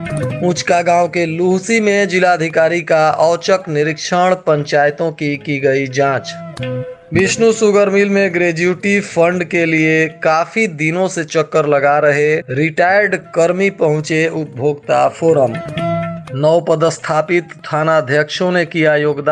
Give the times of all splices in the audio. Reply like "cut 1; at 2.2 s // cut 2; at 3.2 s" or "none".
none